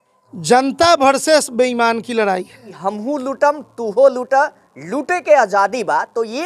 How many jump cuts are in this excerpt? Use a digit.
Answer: 1